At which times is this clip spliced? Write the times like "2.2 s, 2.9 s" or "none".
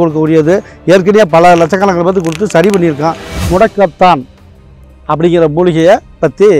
3.3 s

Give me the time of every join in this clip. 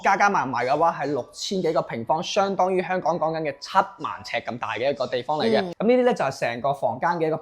5.7 s

